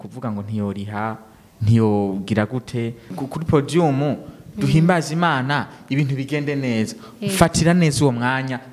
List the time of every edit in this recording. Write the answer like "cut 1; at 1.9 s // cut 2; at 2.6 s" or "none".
cut 1; at 3.1 s